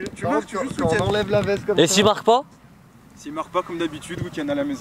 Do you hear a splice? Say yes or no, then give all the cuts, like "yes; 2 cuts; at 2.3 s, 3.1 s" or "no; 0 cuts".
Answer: no; 0 cuts